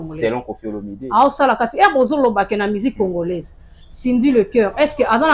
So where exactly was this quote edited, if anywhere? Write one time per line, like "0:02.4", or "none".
none